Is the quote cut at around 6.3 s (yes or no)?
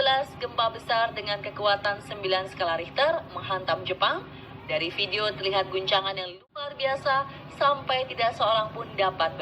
yes